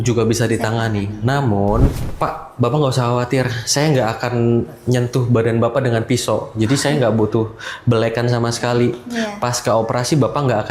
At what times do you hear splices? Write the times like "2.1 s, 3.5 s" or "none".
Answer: 2.0 s